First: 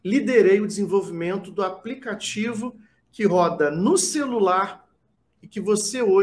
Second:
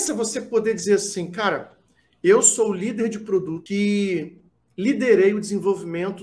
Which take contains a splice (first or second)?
second